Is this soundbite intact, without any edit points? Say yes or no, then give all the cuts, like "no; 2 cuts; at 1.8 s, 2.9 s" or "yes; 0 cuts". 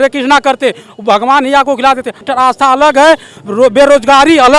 no; 2 cuts; at 2.3 s, 3.3 s